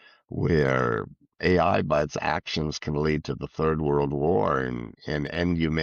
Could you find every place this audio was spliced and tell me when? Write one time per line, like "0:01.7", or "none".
none